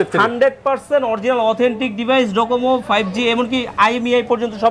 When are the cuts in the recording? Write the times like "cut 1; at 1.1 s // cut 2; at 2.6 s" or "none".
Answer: none